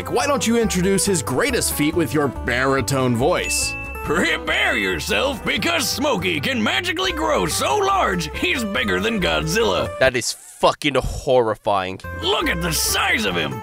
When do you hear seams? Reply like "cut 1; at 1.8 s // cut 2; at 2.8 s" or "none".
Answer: none